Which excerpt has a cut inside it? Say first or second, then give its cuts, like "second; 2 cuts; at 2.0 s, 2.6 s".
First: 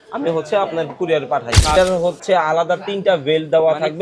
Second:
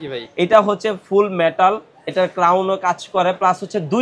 first; 1 cut; at 1.8 s